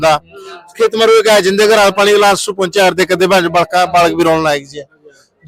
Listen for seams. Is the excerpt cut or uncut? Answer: uncut